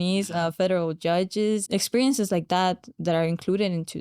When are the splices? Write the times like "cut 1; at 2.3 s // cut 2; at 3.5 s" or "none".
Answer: cut 1; at 1.6 s